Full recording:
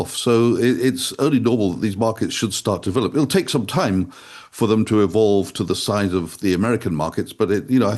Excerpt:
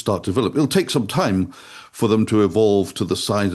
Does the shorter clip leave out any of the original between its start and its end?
no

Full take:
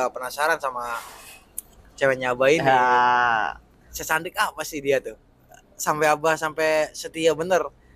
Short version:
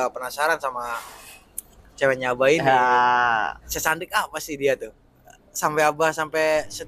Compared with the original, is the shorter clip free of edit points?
no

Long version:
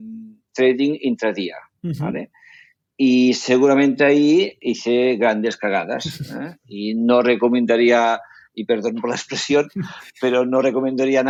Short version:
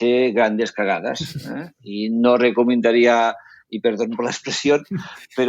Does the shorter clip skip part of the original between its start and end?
no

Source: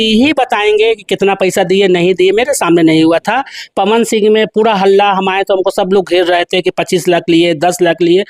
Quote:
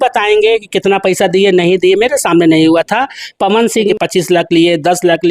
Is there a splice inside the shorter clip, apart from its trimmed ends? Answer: yes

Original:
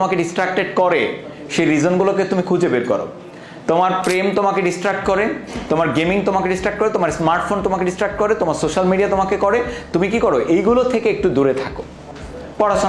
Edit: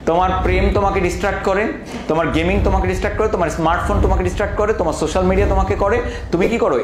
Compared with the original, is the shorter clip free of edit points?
yes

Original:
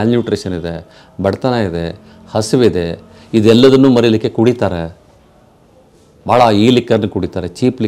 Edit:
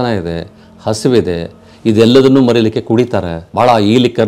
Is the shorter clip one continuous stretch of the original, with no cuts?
no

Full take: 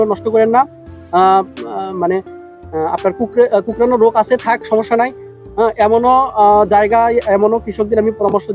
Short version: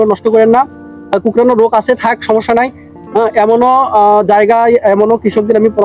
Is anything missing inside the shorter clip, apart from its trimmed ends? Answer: yes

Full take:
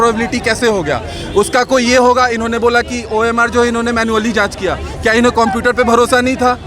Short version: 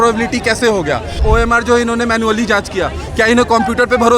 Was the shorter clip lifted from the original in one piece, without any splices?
no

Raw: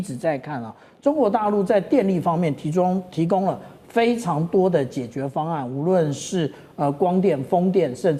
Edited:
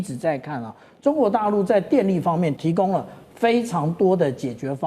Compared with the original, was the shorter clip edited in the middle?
yes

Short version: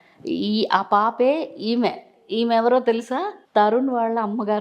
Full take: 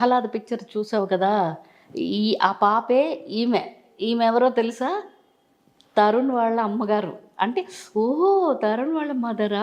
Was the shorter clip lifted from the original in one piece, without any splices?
no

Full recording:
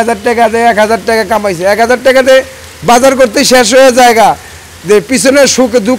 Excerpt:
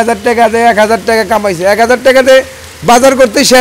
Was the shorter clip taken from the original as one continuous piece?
yes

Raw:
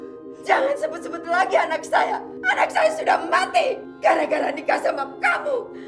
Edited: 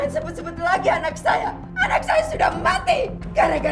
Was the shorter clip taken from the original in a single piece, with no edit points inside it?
yes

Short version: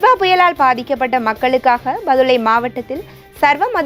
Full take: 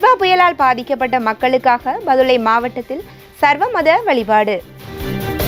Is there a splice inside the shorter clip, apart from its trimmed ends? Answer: no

